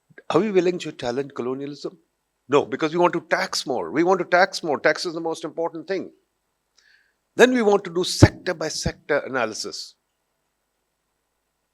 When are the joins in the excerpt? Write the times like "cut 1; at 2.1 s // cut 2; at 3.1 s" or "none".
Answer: none